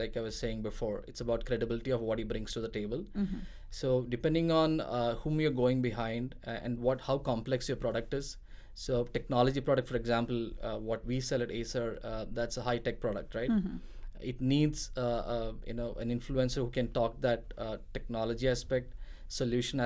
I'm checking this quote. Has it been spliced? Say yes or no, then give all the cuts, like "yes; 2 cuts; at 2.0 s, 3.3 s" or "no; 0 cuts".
no; 0 cuts